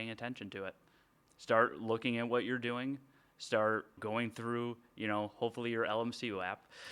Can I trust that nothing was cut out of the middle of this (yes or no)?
no